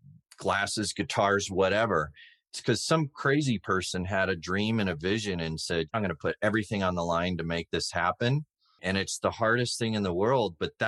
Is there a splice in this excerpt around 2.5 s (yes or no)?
no